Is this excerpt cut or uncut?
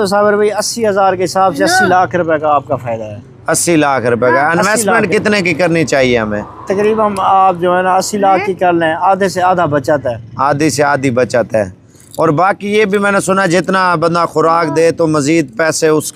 uncut